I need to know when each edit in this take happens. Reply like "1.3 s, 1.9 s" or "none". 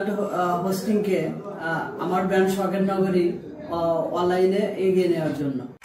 none